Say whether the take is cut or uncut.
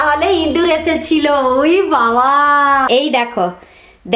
cut